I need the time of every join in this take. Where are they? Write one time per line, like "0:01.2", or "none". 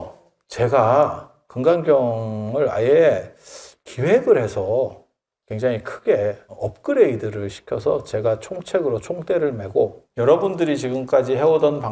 0:01.4
0:06.5
0:10.0